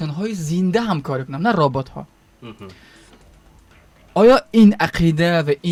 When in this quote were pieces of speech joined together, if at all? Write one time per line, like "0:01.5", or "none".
none

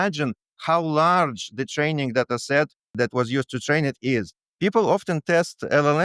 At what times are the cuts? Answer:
0:02.9
0:04.4

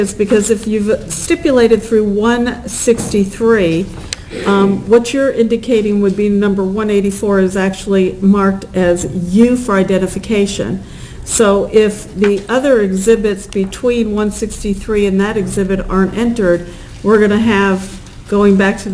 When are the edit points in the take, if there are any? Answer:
0:03.4

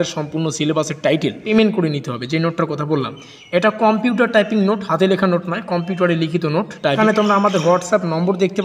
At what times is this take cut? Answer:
0:01.4
0:07.0

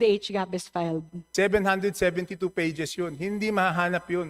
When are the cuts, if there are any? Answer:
0:01.2

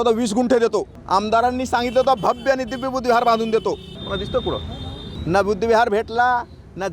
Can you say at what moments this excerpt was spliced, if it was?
0:01.0
0:03.9
0:05.1

